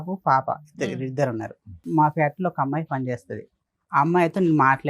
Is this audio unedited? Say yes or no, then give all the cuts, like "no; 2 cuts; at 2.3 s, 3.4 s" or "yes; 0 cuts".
no; 1 cut; at 1.9 s